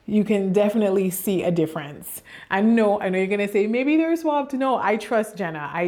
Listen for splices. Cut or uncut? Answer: uncut